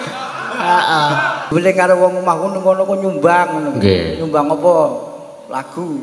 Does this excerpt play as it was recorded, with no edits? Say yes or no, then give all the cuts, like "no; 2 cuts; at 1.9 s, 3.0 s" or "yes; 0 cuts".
no; 1 cut; at 1.5 s